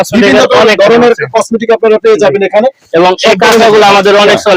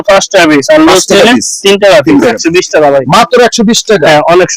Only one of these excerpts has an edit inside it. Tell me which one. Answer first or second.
second